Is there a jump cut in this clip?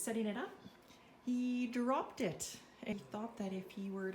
yes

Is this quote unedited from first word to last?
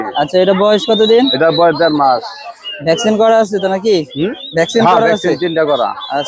yes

